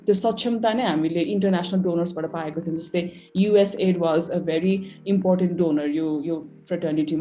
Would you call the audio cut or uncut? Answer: uncut